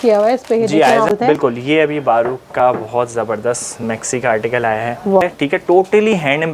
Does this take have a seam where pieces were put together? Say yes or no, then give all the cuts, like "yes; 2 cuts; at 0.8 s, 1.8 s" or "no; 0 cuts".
yes; 2 cuts; at 1.1 s, 5.2 s